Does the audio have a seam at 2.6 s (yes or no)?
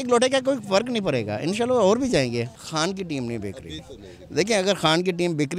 yes